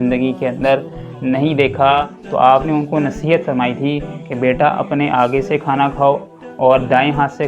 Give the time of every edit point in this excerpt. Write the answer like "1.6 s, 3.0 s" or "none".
2.2 s